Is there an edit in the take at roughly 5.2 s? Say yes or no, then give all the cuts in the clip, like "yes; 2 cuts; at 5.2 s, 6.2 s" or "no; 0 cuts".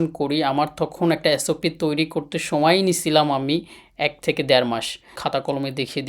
yes; 1 cut; at 5.2 s